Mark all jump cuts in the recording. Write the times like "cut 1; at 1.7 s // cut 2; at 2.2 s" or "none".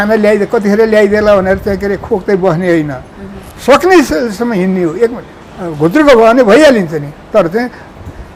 none